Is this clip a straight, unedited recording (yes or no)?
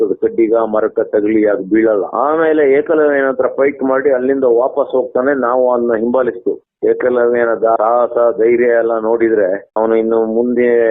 no